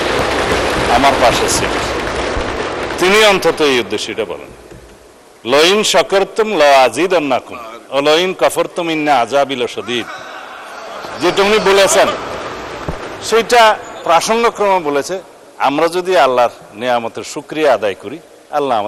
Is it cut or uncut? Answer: uncut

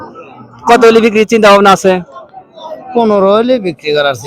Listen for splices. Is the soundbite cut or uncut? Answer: uncut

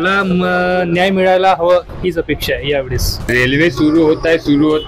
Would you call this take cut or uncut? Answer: cut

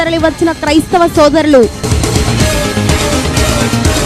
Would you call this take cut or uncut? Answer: uncut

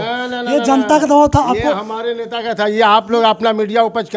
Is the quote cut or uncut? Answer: uncut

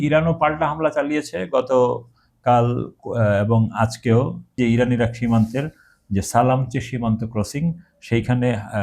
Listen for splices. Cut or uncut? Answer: cut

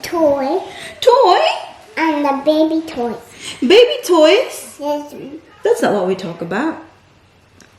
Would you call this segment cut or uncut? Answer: uncut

